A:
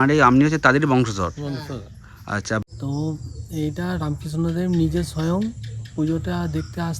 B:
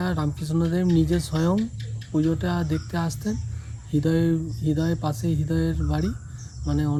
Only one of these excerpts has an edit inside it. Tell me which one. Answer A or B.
A